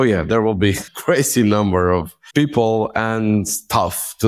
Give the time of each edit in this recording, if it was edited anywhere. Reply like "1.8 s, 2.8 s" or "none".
0.9 s, 2.2 s